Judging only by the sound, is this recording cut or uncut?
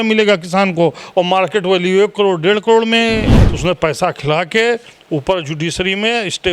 cut